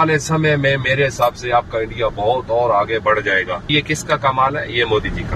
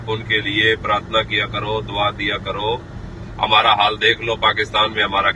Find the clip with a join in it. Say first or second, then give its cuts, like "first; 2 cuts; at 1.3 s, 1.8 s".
first; 1 cut; at 3.7 s